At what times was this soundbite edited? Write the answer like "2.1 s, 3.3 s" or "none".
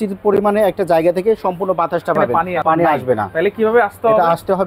2.4 s